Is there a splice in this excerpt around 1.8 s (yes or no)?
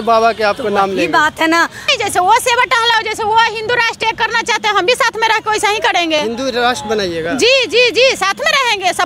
yes